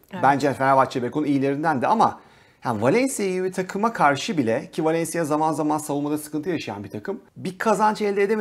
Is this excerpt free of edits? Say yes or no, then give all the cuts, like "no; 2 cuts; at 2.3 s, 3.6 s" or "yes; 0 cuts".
no; 1 cut; at 7.3 s